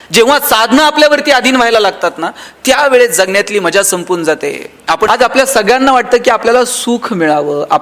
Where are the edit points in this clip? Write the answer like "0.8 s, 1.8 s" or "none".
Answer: 5.1 s